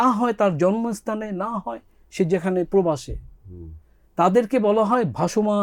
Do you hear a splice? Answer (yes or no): no